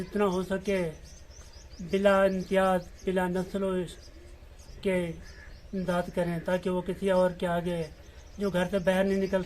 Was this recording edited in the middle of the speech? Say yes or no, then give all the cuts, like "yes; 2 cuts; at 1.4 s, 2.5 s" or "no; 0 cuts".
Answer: no; 0 cuts